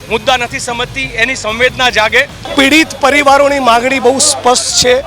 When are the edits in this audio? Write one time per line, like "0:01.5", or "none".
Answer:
0:02.4